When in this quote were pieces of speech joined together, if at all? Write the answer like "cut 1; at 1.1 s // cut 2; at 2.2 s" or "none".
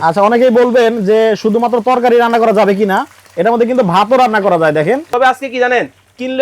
cut 1; at 5.1 s